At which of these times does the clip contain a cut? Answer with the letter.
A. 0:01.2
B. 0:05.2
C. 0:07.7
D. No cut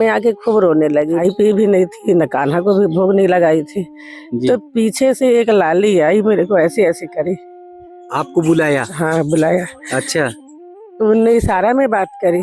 A